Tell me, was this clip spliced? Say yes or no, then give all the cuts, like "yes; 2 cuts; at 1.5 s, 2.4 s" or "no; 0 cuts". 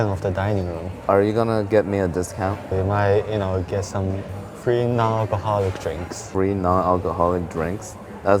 yes; 4 cuts; at 1.1 s, 2.6 s, 4.5 s, 6.3 s